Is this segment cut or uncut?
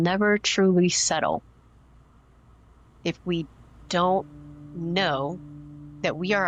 uncut